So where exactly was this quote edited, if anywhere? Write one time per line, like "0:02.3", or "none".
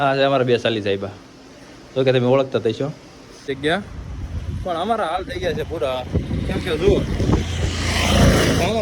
0:03.5